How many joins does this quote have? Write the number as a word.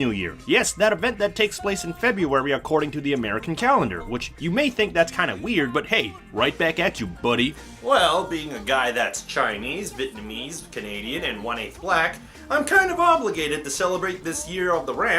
one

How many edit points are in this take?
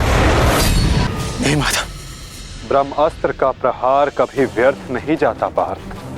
one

